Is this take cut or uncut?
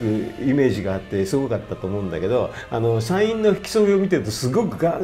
uncut